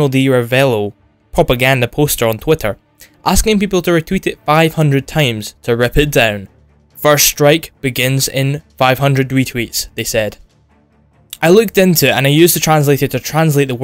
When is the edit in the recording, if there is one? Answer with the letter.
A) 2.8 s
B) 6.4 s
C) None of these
B